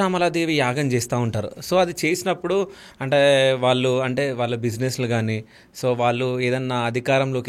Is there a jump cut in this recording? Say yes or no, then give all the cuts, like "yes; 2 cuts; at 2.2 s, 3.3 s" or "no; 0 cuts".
no; 0 cuts